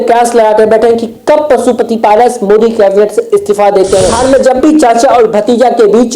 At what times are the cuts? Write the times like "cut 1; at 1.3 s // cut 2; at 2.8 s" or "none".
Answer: cut 1; at 4.1 s